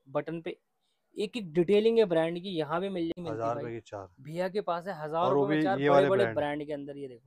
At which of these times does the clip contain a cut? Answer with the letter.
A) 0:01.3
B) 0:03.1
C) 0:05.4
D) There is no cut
B